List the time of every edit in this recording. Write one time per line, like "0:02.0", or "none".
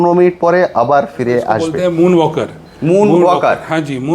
0:01.7